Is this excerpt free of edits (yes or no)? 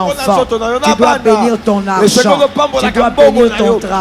yes